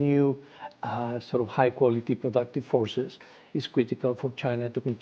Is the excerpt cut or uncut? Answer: uncut